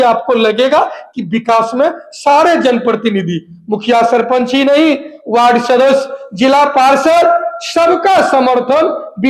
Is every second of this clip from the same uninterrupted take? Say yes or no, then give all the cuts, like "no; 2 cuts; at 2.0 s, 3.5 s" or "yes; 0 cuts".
yes; 0 cuts